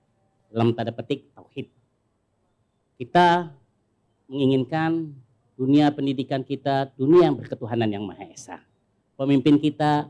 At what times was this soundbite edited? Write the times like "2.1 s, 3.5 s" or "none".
none